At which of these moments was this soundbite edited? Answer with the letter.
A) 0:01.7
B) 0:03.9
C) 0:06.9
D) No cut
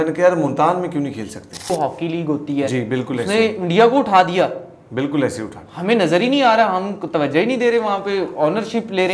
A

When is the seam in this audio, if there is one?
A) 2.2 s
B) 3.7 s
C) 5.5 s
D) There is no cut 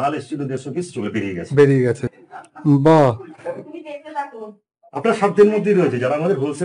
A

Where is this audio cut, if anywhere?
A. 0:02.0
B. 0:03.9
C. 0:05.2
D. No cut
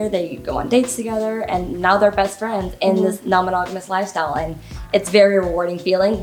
D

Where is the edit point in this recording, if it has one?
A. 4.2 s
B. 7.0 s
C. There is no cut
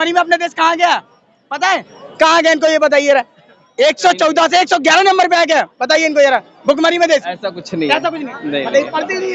C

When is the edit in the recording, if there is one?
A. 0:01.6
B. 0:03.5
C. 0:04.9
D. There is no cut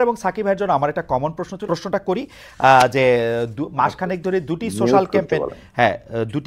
A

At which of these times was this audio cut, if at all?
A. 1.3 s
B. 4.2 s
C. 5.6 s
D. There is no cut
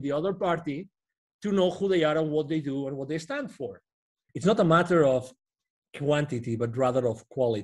B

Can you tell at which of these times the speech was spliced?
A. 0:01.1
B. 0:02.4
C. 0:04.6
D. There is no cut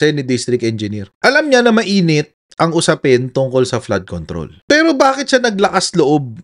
C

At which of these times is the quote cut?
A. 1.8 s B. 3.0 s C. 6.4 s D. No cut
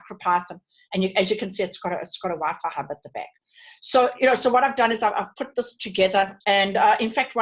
C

